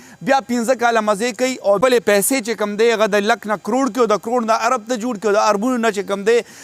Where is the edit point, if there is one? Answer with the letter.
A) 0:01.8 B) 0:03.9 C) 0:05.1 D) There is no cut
A